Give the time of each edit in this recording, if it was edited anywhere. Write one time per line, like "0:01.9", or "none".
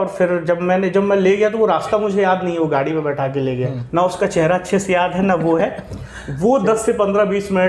0:03.8